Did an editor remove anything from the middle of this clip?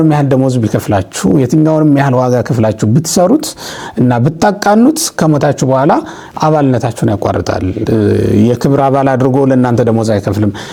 no; 0 cuts

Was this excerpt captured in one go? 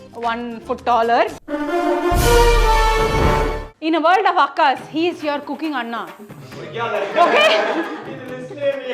yes; 0 cuts

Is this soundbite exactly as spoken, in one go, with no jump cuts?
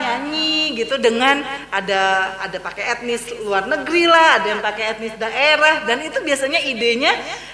yes; 0 cuts

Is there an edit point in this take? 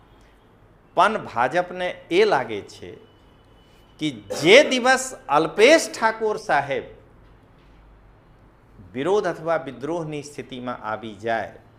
no; 0 cuts

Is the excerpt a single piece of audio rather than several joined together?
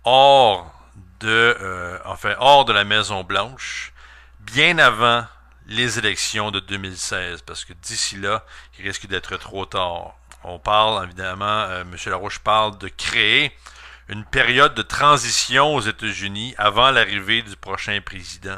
yes; 0 cuts

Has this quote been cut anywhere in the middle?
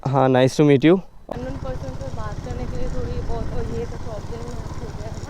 yes; 1 cut; at 1.2 s

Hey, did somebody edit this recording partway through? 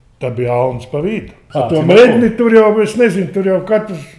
yes; 1 cut; at 1.4 s

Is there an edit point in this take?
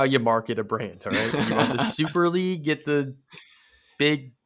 no; 0 cuts

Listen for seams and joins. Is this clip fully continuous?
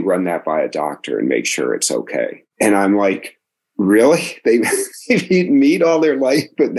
yes; 0 cuts

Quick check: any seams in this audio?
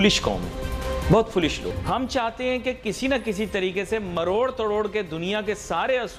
no; 0 cuts

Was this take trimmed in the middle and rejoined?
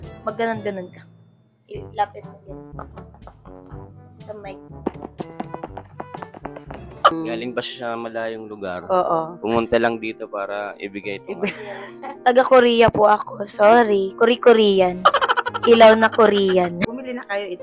yes; 2 cuts; at 7.1 s, 16.7 s

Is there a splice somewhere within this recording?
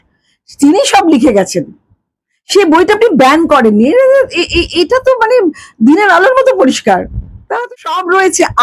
yes; 1 cut; at 7.6 s

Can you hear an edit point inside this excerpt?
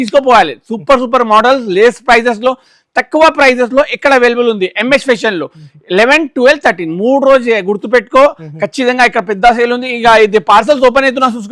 no; 0 cuts

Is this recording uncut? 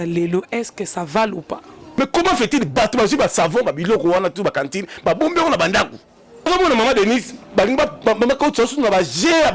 no; 2 cuts; at 1.8 s, 6.5 s

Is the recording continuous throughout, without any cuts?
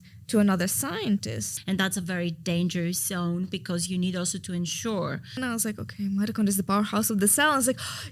no; 2 cuts; at 1.5 s, 5.4 s

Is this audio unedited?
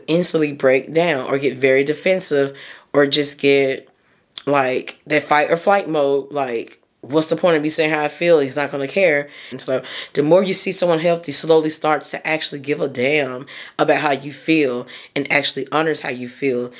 no; 1 cut; at 9.6 s

